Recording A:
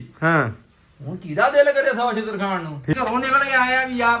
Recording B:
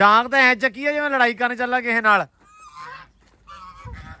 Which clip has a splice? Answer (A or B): A